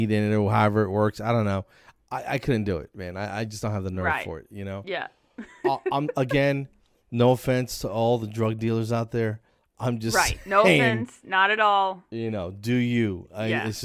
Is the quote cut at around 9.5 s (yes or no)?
no